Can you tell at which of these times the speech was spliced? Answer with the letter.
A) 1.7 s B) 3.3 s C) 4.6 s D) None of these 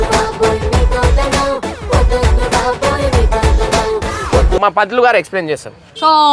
C